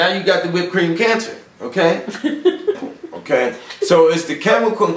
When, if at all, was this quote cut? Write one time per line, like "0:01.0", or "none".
none